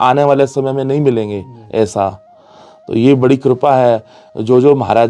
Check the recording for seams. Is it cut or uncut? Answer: uncut